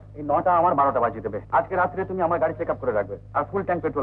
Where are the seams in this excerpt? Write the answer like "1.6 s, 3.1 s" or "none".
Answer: 1.4 s